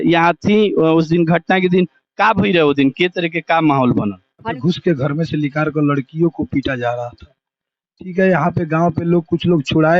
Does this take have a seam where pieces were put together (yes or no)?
yes